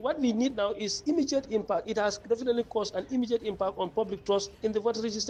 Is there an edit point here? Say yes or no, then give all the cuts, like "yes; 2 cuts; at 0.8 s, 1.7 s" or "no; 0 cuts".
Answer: no; 0 cuts